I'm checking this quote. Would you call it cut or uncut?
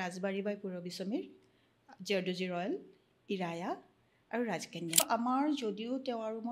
cut